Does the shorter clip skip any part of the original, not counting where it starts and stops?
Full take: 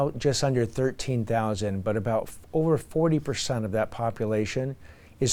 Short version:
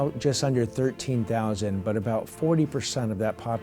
yes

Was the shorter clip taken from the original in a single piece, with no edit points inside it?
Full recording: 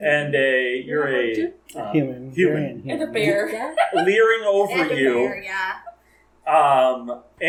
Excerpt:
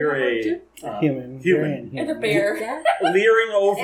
yes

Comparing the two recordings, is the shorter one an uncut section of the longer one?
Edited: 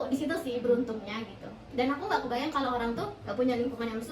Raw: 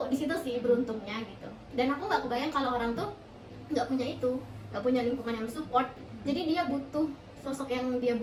no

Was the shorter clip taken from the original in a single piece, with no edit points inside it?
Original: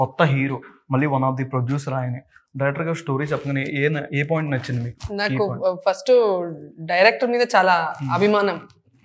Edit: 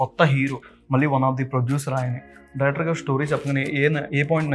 yes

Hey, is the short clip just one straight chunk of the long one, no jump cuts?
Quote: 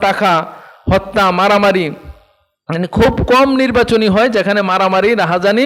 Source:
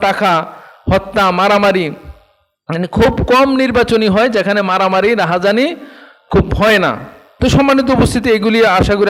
yes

